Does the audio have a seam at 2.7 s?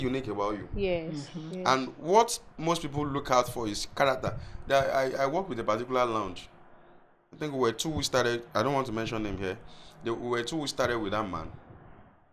no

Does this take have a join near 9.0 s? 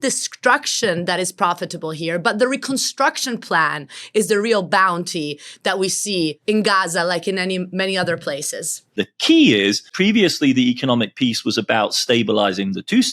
yes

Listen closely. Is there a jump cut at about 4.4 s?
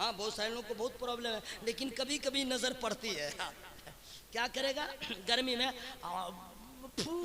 no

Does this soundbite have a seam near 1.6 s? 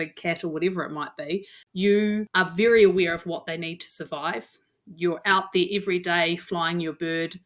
yes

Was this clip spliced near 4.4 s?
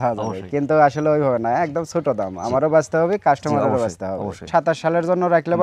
yes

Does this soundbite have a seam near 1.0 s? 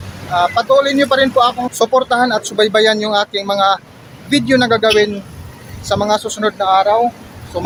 no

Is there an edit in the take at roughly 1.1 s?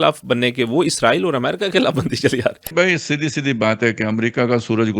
no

